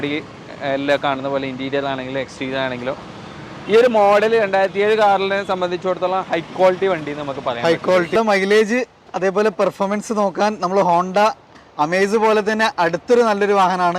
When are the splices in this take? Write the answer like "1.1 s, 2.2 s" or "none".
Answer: 8.1 s